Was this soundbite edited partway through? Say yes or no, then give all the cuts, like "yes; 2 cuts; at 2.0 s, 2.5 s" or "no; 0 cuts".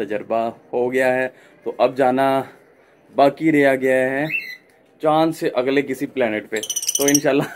no; 0 cuts